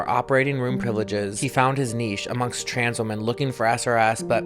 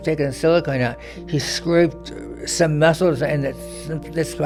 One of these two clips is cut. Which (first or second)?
first